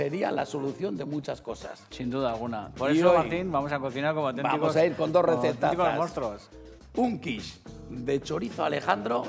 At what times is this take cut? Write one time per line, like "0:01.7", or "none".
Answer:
none